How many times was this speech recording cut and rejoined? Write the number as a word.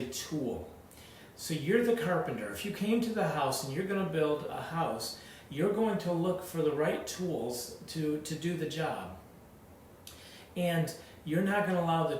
zero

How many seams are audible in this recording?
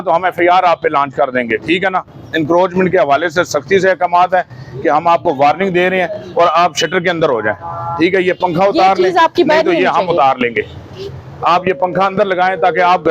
zero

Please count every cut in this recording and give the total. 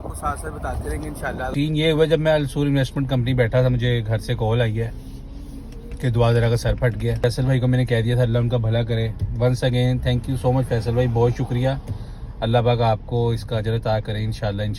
two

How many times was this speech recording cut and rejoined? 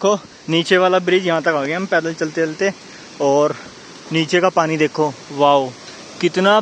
zero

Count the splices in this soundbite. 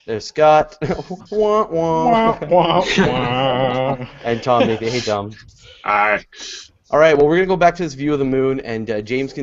one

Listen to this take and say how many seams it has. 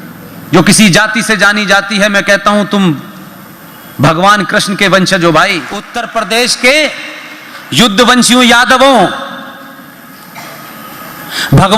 one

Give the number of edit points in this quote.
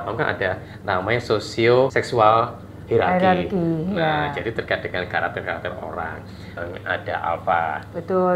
two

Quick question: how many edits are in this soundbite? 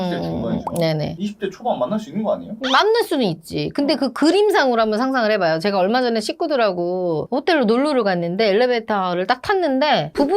zero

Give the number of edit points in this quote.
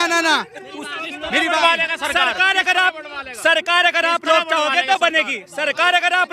zero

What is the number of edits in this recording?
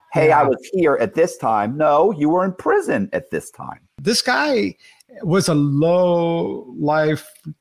one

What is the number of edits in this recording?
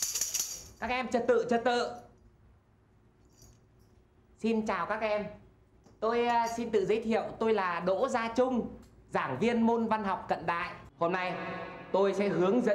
one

